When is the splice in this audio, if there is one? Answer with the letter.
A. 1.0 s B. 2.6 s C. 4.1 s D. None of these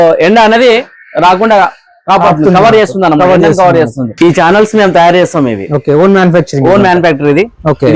C